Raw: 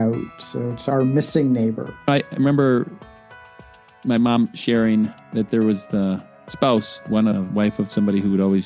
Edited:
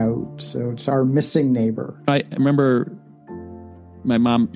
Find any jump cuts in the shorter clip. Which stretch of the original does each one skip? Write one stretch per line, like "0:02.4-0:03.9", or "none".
none